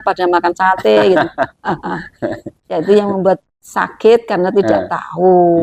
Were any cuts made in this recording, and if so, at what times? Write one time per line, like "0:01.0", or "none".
none